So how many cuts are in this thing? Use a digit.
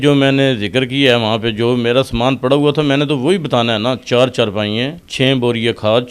1